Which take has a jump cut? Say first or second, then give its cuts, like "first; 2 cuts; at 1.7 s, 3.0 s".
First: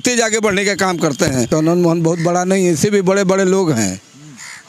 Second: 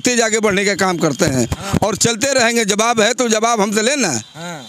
first; 1 cut; at 1.5 s